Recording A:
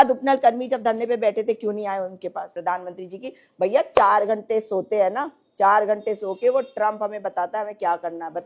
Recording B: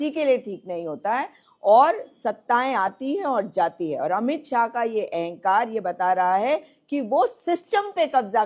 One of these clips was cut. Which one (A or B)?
A